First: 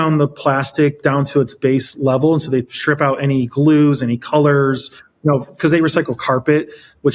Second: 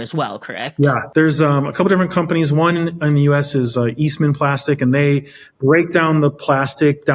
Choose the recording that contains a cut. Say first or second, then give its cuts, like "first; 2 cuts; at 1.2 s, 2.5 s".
second; 1 cut; at 1.0 s